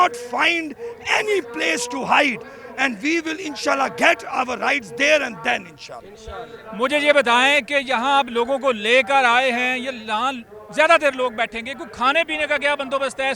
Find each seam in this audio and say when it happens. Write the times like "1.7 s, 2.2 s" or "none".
none